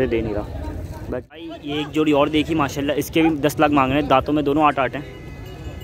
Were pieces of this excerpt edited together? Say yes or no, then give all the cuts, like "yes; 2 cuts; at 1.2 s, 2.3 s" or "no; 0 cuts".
yes; 1 cut; at 1.1 s